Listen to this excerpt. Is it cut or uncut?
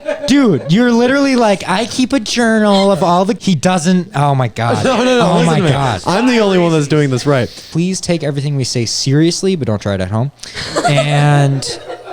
cut